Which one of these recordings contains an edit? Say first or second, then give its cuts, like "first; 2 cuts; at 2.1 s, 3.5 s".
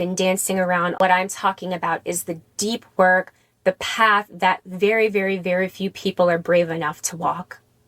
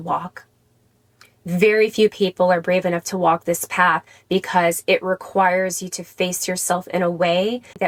first; 1 cut; at 1.0 s